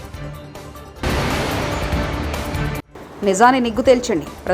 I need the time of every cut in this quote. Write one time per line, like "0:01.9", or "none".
0:01.0
0:02.8